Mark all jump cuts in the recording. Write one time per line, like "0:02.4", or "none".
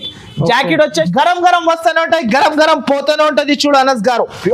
0:01.1